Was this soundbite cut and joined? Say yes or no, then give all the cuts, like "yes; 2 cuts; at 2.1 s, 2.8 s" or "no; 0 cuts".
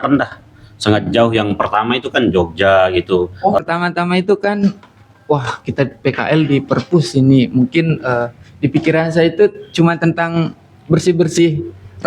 yes; 1 cut; at 3.6 s